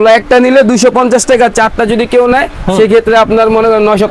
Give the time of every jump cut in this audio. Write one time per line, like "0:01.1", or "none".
none